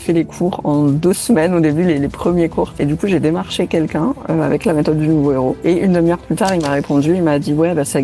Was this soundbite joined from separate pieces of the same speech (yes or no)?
yes